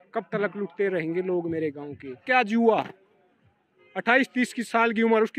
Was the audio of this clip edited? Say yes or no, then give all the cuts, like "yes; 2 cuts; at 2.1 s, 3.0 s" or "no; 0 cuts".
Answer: yes; 1 cut; at 2.2 s